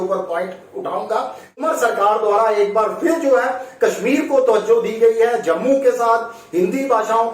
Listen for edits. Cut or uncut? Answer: cut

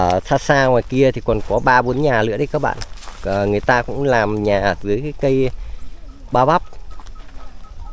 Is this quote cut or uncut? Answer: uncut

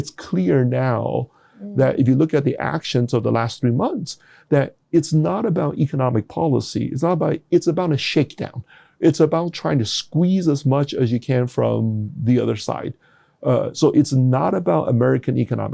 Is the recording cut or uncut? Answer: uncut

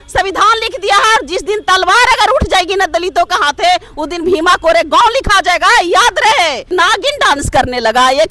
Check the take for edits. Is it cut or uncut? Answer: cut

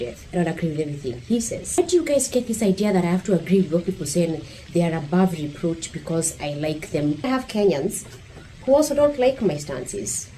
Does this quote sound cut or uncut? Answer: cut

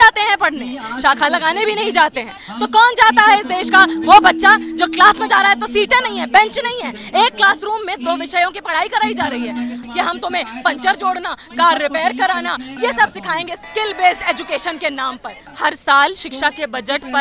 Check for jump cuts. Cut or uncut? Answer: cut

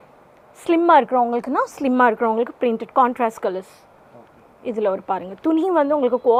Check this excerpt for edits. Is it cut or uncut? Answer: uncut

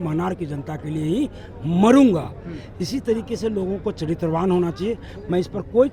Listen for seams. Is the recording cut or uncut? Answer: uncut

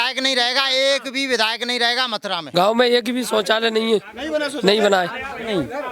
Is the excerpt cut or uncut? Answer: cut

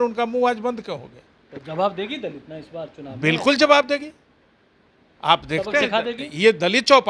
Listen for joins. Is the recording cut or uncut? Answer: uncut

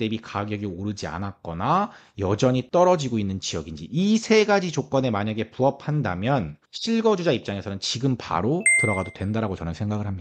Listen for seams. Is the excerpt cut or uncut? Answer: uncut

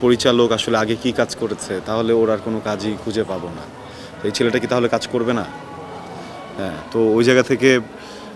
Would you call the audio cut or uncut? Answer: uncut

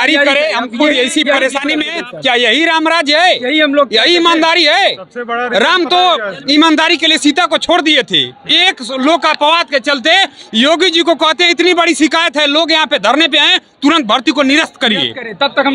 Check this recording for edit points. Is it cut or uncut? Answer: uncut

